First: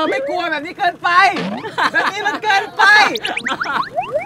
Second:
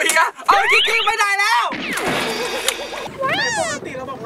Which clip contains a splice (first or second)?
second